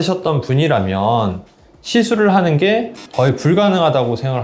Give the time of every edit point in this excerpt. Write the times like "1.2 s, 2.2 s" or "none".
none